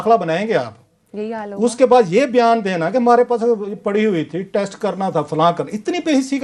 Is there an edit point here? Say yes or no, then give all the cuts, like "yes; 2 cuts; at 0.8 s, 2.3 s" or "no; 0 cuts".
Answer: no; 0 cuts